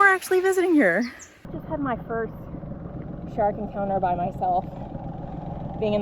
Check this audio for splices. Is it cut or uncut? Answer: cut